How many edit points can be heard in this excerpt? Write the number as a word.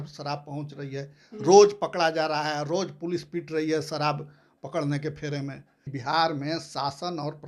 one